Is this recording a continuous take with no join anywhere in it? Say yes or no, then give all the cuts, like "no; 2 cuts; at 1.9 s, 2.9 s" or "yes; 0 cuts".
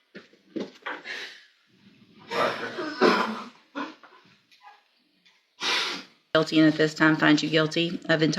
no; 1 cut; at 6.3 s